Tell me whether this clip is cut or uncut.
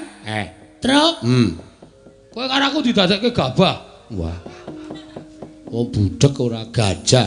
uncut